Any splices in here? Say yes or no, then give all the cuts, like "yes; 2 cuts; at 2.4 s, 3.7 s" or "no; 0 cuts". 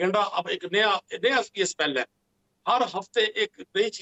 no; 0 cuts